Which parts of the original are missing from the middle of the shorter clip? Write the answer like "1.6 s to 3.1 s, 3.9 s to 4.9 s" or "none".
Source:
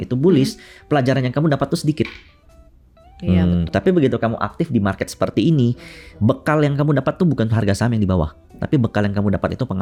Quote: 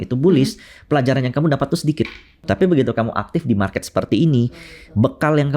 2.4 s to 3.7 s

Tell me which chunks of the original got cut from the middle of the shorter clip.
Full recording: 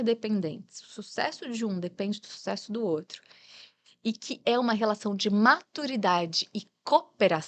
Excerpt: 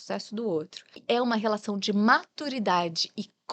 3.3 s to 4.3 s

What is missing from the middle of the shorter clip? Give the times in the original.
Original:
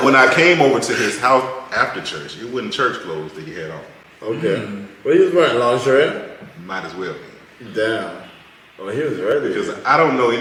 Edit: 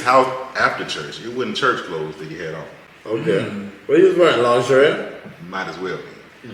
none

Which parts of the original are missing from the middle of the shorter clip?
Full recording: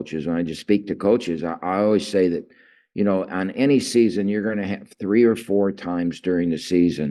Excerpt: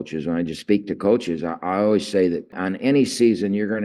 2.6 s to 3.3 s

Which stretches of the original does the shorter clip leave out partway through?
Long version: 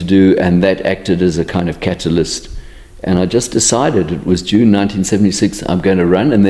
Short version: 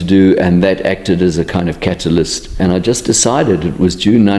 2.4 s to 2.9 s

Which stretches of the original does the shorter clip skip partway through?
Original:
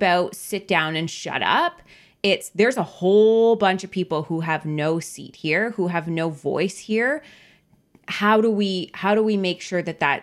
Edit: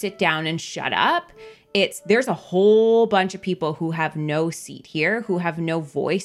none

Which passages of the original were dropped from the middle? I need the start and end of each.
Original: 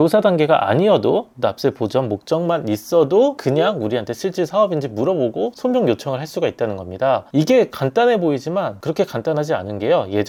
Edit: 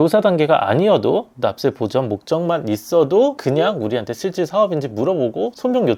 none

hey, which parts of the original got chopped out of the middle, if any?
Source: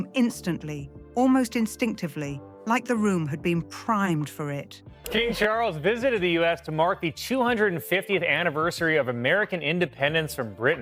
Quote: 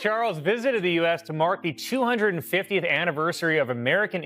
none

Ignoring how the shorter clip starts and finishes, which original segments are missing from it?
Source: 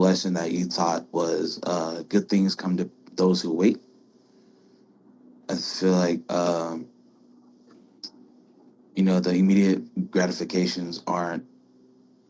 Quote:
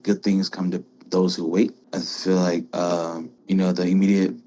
3.9 s to 5.4 s, 6.8 s to 8.8 s

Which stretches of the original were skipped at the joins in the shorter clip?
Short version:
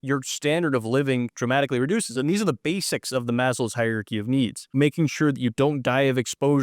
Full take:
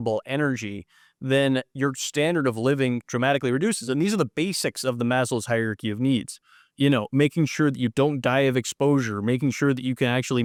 6.4 s to 7.1 s

